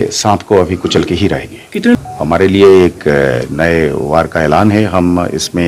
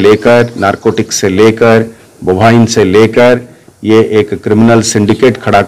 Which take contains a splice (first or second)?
first